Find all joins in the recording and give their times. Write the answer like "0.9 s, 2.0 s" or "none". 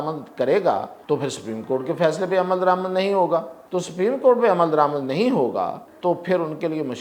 0.9 s, 3.6 s, 5.9 s